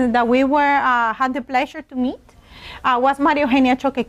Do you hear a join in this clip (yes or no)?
yes